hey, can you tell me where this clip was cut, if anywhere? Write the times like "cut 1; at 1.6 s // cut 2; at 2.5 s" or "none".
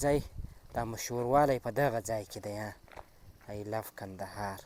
none